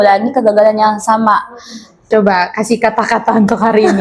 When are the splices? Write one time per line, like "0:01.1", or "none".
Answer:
0:02.0